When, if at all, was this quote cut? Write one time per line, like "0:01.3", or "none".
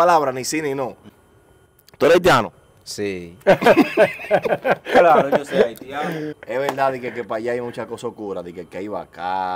0:01.1
0:06.3